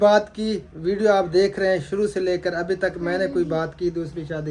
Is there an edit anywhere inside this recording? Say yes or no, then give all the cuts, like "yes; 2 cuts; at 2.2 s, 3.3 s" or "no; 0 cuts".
no; 0 cuts